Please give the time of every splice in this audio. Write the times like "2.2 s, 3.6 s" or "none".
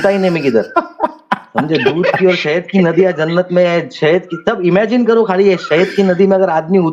none